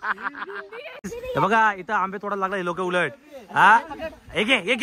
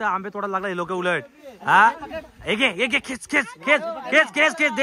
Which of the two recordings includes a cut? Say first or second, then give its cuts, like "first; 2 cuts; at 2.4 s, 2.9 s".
first; 1 cut; at 0.9 s